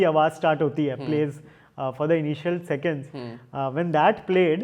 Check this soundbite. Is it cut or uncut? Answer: uncut